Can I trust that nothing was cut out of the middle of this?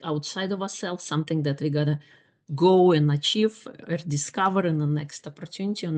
yes; 0 cuts

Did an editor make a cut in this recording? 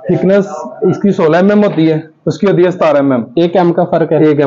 no; 0 cuts

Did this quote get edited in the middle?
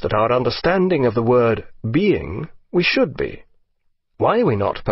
yes; 1 cut; at 1.6 s

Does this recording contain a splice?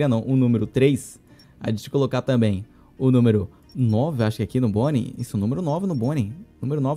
no; 0 cuts

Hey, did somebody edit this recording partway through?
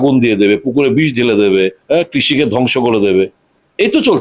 yes; 1 cut; at 1.8 s

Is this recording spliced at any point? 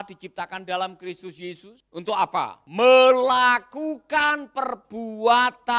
yes; 2 cuts; at 1.7 s, 2.6 s

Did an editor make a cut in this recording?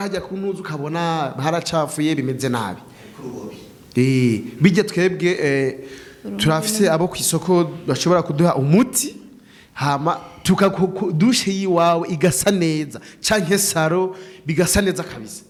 no; 0 cuts

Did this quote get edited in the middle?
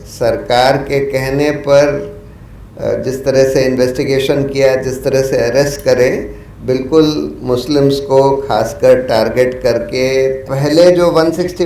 yes; 1 cut; at 10.5 s

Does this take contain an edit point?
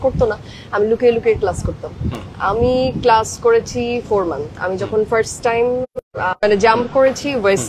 no; 0 cuts

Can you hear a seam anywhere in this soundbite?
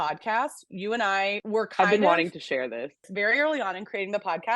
yes; 2 cuts; at 1.4 s, 3.1 s

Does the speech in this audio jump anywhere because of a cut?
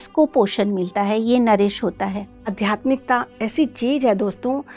yes; 1 cut; at 2.5 s

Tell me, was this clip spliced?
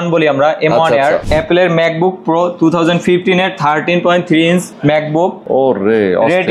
yes; 2 cuts; at 1.2 s, 5.2 s

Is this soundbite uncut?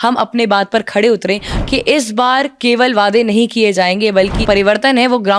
no; 2 cuts; at 1.5 s, 4.4 s

